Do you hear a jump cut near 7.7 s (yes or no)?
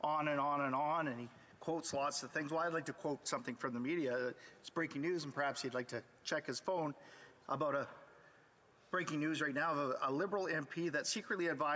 yes